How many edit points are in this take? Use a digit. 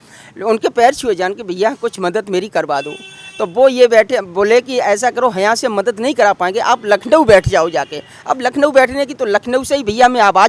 0